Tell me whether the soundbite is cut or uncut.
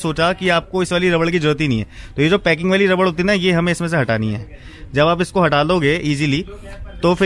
uncut